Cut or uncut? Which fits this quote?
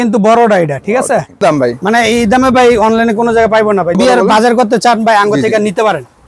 cut